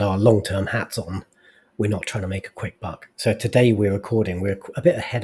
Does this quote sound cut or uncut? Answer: uncut